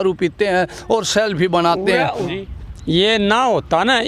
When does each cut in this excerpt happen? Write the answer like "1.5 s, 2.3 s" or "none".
2.2 s